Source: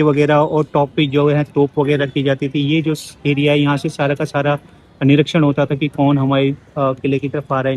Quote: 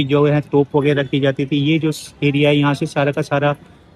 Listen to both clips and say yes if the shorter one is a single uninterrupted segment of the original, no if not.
yes